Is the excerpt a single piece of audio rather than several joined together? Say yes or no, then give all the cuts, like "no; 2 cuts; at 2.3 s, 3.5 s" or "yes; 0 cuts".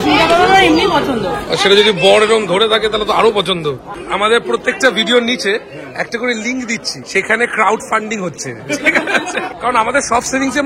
no; 4 cuts; at 1.5 s, 3.9 s, 7.0 s, 9.5 s